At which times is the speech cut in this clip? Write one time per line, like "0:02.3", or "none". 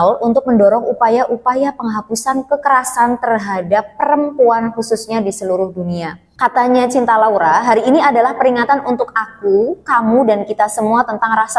0:06.2